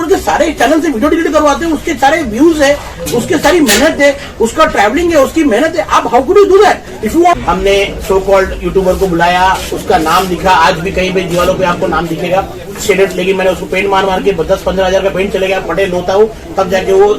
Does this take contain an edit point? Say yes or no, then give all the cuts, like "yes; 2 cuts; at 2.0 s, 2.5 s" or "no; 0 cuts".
yes; 1 cut; at 7.3 s